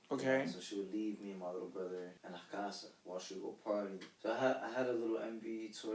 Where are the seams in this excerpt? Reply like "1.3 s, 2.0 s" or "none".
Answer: 2.2 s, 2.9 s, 4.1 s